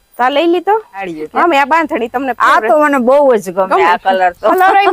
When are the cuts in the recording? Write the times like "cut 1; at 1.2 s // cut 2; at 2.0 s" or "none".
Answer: cut 1; at 1.2 s

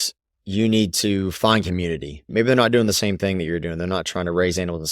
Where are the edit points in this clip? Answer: cut 1; at 2.3 s

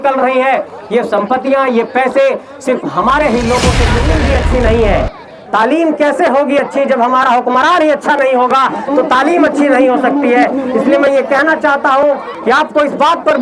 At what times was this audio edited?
cut 1; at 4.1 s

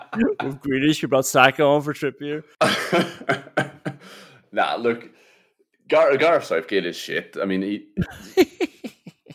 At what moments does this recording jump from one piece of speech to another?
cut 1; at 2.5 s

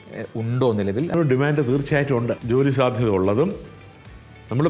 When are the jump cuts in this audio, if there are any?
cut 1; at 1.1 s // cut 2; at 2.4 s

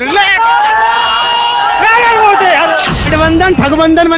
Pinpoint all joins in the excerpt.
cut 1; at 3.0 s

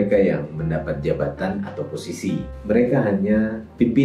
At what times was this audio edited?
cut 1; at 2.5 s

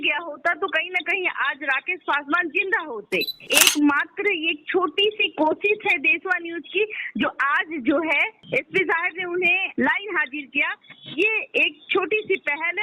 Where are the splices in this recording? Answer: cut 1; at 3.4 s

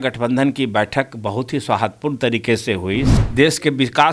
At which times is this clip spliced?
cut 1; at 3.2 s

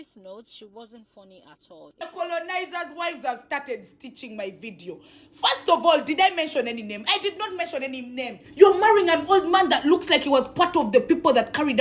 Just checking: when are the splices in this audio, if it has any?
cut 1; at 2.0 s // cut 2; at 8.4 s

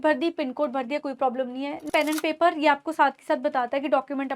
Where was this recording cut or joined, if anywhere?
cut 1; at 1.9 s

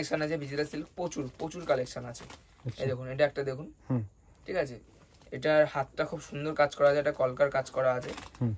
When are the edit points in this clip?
none

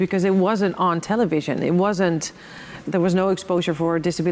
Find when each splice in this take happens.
cut 1; at 2.9 s

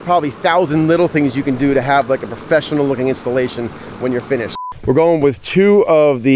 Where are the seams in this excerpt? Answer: cut 1; at 4.6 s

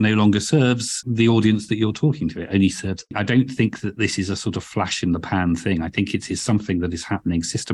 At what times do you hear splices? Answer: cut 1; at 1.1 s // cut 2; at 3.1 s

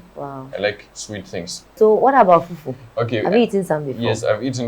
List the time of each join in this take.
cut 1; at 1.7 s

